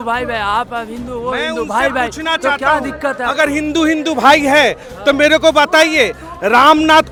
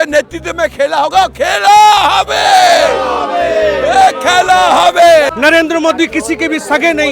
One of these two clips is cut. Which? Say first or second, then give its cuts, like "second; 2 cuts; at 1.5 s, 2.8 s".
second; 1 cut; at 5.3 s